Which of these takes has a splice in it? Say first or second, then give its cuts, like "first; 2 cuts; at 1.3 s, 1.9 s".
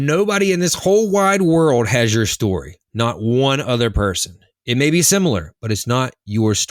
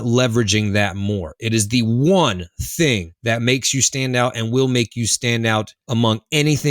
second; 2 cuts; at 3.1 s, 5.8 s